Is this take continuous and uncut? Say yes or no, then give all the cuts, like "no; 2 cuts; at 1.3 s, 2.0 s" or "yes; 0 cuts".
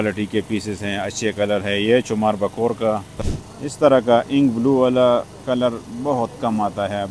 no; 1 cut; at 3.2 s